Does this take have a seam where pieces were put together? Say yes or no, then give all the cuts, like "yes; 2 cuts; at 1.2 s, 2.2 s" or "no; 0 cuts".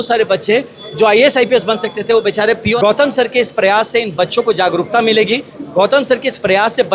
yes; 1 cut; at 2.7 s